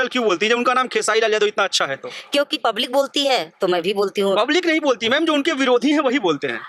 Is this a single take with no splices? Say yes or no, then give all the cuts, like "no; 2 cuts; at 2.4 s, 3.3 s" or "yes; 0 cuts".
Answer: yes; 0 cuts